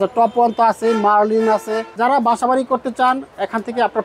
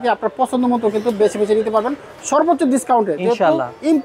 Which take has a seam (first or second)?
first